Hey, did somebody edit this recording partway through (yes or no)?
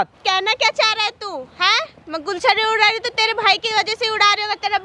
no